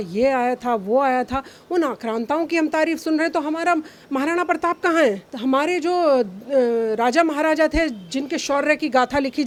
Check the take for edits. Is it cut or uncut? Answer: uncut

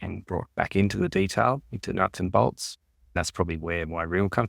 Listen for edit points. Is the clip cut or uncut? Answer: cut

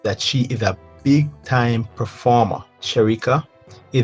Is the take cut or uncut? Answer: cut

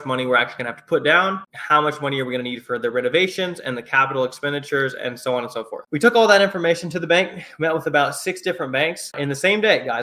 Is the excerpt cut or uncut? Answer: cut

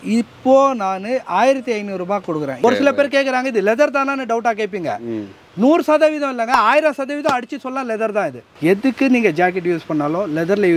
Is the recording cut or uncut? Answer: cut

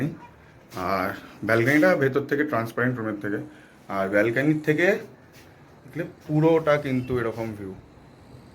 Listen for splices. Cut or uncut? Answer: uncut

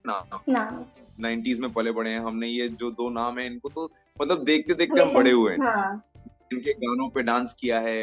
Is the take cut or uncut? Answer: cut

